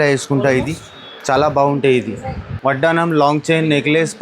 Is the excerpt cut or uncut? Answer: cut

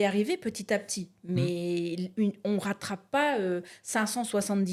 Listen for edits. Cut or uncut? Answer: uncut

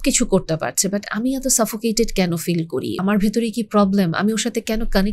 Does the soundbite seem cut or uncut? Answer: cut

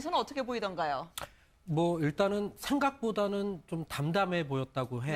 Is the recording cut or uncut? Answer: uncut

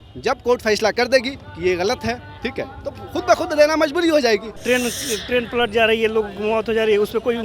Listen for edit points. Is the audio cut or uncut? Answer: cut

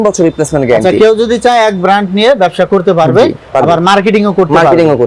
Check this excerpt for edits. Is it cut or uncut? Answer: uncut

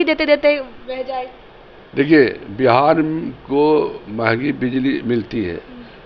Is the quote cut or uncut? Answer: uncut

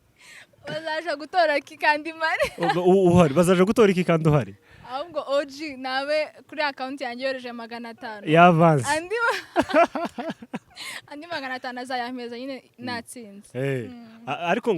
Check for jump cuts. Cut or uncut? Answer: uncut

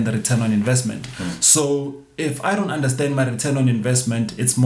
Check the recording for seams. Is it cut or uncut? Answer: uncut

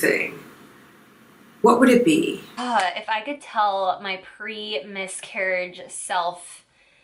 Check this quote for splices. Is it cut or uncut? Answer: cut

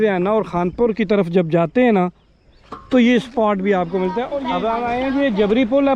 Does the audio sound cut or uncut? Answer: cut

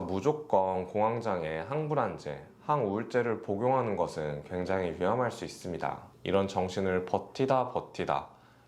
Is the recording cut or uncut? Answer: cut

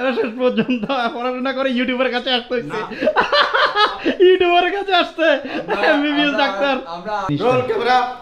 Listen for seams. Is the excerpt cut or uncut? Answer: cut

